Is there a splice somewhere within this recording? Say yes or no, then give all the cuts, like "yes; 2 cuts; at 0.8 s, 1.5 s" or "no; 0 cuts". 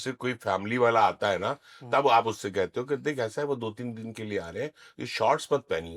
no; 0 cuts